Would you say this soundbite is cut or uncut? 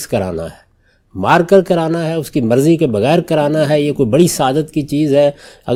uncut